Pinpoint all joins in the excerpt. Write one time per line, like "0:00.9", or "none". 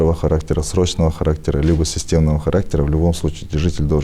none